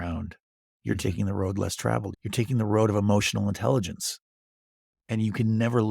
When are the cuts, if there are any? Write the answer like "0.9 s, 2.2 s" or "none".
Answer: 2.2 s